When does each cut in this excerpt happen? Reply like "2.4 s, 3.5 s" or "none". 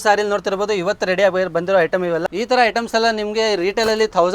2.3 s

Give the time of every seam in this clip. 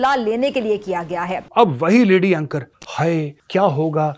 1.4 s

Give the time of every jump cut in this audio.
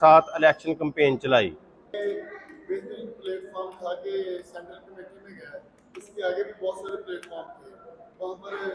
1.9 s

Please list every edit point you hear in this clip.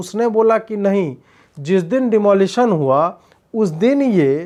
none

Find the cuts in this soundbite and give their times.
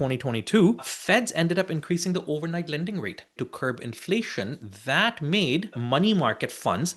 0.9 s, 3.4 s, 5.8 s

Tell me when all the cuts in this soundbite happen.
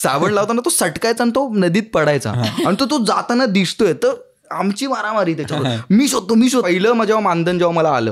6.6 s

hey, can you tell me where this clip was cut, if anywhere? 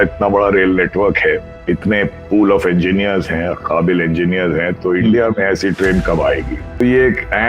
1.5 s, 6.8 s

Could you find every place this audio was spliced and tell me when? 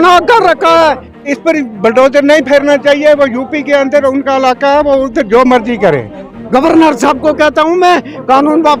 1.3 s, 6.3 s

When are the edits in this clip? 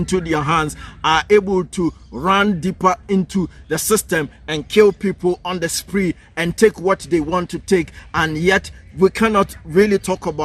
none

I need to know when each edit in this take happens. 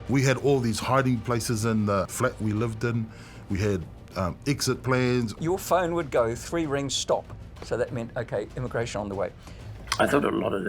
2.1 s, 5.4 s, 9.5 s

